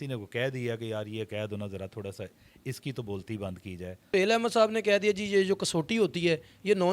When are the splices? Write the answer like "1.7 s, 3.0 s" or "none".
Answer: 4.0 s